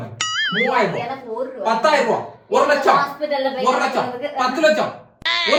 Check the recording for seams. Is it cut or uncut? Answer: uncut